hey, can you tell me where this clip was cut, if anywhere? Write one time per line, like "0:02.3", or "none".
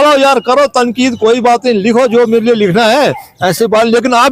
none